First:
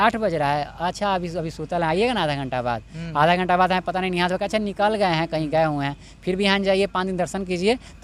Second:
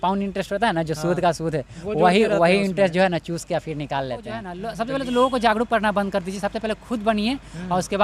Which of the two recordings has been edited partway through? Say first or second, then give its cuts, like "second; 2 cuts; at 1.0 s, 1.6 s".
second; 1 cut; at 4.6 s